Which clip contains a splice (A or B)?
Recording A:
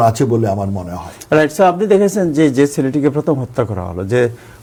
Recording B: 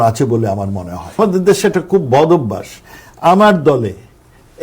B